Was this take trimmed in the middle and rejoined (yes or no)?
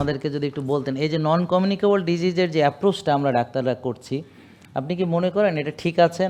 no